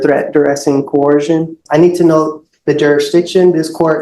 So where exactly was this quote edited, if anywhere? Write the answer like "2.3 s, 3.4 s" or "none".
1.6 s